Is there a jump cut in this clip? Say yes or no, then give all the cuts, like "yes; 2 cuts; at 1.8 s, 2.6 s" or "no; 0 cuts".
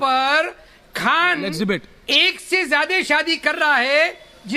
yes; 1 cut; at 2.4 s